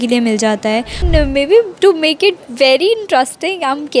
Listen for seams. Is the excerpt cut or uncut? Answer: cut